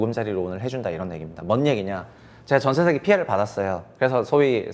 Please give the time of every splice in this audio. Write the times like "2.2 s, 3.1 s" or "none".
none